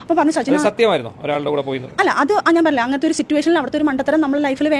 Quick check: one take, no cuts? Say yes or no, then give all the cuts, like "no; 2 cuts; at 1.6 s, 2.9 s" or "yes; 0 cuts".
yes; 0 cuts